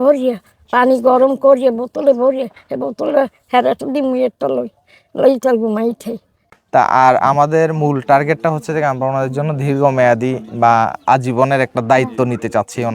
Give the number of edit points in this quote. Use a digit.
1